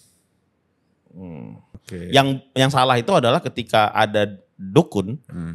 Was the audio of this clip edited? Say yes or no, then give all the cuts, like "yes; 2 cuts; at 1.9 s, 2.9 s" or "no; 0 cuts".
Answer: yes; 1 cut; at 1.8 s